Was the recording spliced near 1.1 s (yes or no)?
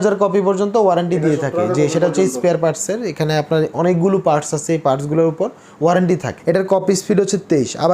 no